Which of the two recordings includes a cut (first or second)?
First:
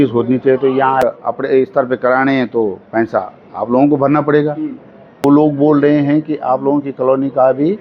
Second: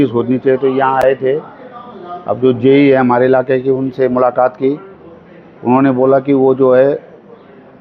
first